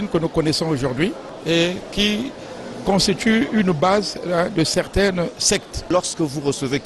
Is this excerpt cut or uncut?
cut